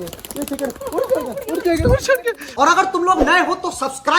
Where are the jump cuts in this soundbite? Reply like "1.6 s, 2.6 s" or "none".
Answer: 2.8 s